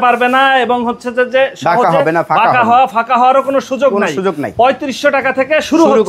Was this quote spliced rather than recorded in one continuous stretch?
no; 0 cuts

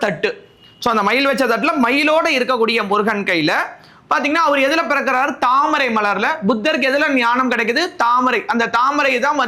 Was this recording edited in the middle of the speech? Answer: no; 0 cuts

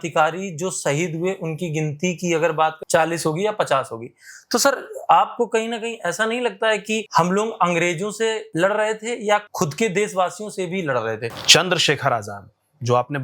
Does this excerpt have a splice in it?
yes; 5 cuts; at 2.8 s, 7.1 s, 8.4 s, 9.5 s, 11.4 s

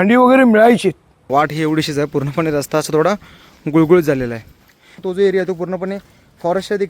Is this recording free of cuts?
no; 2 cuts; at 1.1 s, 5.0 s

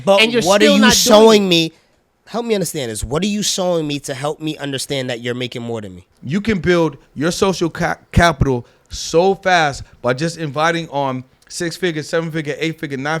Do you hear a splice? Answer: yes; 1 cut; at 6.1 s

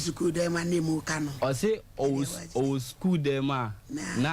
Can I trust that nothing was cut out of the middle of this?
no; 1 cut; at 1.9 s

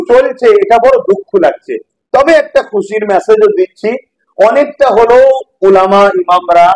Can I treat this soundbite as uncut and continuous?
yes; 0 cuts

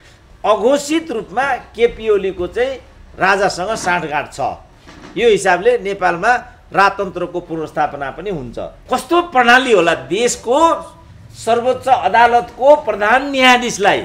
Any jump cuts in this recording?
yes; 1 cut; at 8.8 s

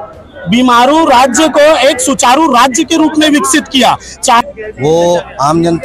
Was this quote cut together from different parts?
yes; 1 cut; at 4.4 s

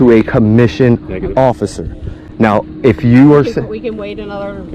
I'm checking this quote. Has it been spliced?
no; 0 cuts

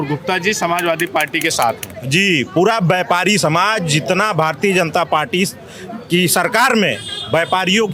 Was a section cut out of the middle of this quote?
no; 0 cuts

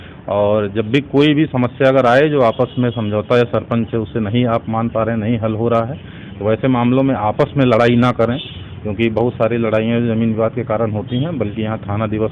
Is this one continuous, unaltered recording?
yes; 0 cuts

